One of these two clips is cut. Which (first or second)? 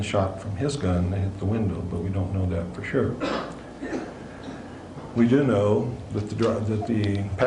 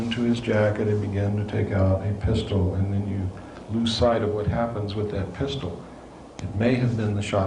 second